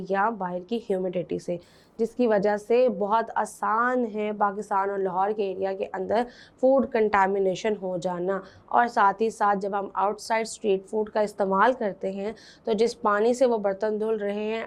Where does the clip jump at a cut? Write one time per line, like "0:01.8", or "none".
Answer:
none